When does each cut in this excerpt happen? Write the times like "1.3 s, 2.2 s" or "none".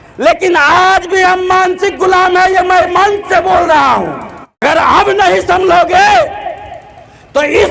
4.6 s